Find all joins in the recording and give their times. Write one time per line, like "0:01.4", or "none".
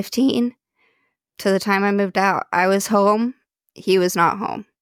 none